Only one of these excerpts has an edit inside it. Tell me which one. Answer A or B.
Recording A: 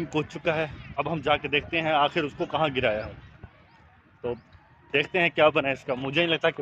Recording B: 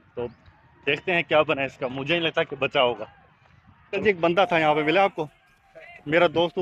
B